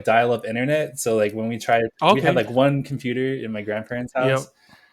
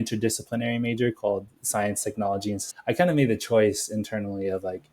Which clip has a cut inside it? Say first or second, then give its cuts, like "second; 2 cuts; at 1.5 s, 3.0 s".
second; 1 cut; at 2.7 s